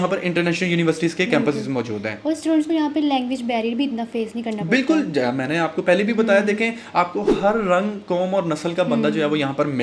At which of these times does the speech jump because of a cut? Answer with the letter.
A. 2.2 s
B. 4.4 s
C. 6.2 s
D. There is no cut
D